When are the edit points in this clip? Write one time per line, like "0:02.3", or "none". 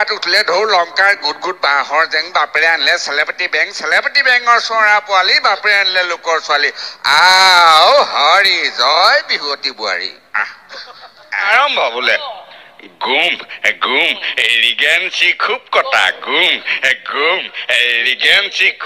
0:11.4